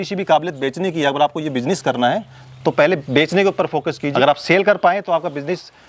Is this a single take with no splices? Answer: no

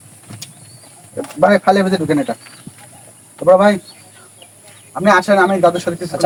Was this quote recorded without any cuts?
yes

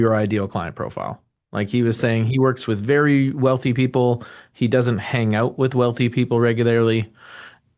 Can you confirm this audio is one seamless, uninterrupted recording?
yes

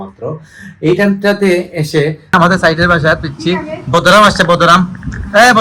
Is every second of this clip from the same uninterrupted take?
no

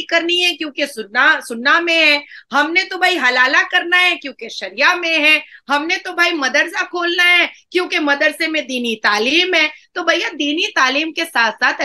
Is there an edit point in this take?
no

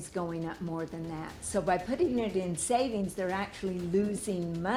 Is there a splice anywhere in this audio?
no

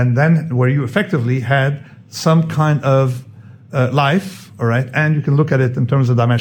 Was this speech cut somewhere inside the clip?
no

